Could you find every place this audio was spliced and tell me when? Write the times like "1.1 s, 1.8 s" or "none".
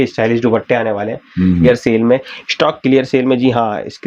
1.7 s